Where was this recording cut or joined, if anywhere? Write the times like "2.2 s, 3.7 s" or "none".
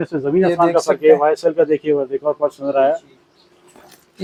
none